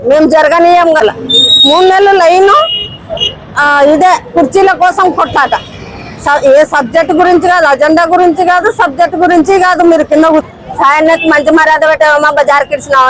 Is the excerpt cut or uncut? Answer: cut